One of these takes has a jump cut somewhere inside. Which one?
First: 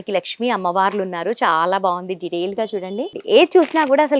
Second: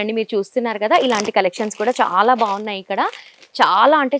first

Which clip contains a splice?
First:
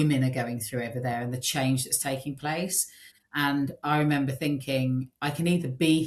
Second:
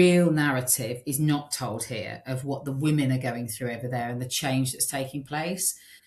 first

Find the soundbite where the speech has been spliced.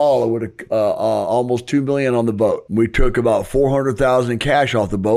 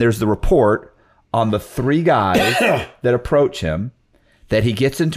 first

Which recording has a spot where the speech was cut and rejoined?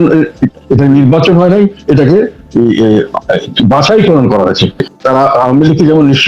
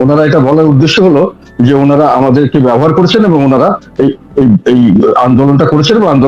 first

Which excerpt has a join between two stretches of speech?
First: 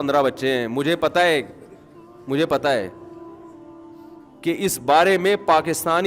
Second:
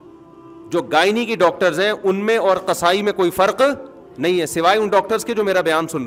first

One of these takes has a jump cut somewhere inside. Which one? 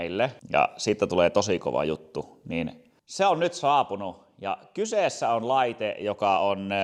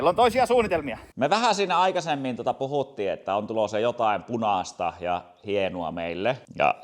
second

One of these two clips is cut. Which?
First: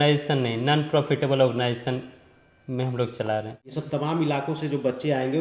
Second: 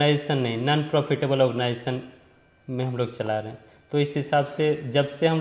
first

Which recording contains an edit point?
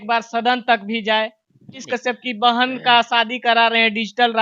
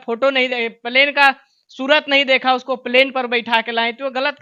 first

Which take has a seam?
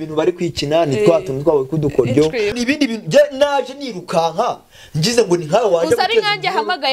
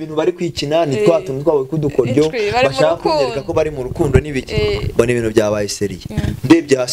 first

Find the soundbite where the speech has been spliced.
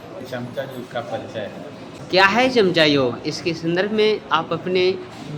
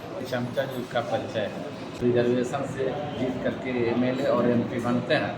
second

